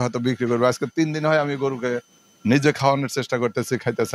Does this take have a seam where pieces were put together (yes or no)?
no